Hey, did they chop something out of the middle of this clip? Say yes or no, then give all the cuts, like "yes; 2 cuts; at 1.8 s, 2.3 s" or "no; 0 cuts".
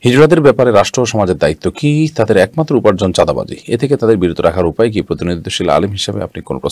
no; 0 cuts